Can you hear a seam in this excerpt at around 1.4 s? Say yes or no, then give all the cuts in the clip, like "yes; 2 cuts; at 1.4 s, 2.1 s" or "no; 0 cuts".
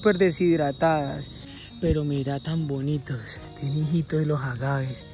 yes; 1 cut; at 1.4 s